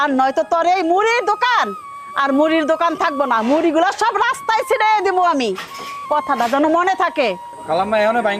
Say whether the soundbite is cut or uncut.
uncut